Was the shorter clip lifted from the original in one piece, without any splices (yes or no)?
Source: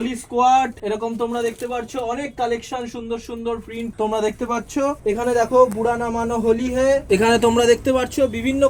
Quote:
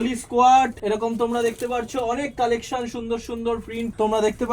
yes